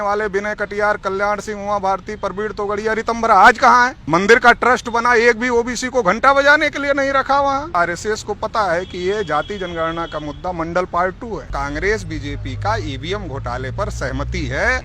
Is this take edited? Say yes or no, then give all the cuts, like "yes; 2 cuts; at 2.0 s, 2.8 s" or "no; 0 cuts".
yes; 3 cuts; at 4.0 s, 7.7 s, 11.5 s